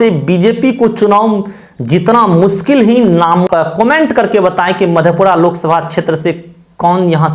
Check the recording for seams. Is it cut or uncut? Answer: cut